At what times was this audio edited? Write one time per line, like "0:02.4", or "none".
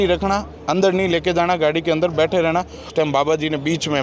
0:02.9